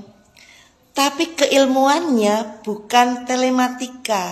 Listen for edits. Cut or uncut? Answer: uncut